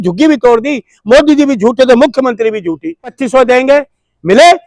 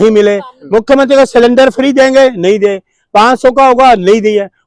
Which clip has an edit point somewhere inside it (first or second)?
first